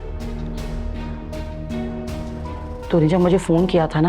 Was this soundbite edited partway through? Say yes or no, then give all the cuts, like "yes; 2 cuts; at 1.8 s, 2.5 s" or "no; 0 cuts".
no; 0 cuts